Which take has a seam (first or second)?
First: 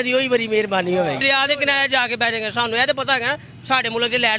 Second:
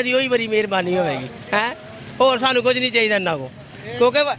first